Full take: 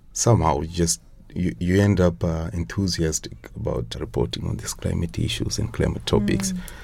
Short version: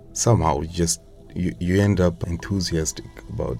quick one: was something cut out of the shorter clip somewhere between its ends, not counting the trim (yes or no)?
yes